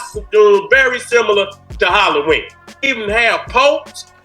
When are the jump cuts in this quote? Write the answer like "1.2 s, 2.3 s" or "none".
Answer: 2.8 s